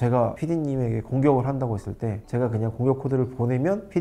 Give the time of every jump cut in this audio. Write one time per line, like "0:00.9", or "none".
none